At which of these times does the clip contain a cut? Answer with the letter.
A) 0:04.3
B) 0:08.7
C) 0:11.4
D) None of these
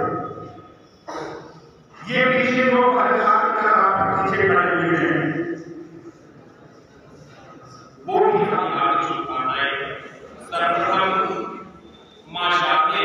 B